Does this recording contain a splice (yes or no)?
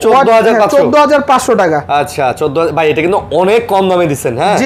no